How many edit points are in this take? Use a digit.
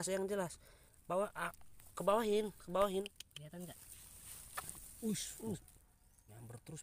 1